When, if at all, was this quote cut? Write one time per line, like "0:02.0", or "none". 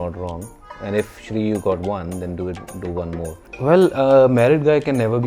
0:03.4